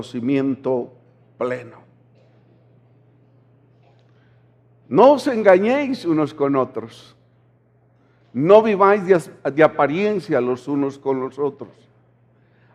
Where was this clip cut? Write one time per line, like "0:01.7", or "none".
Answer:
0:09.3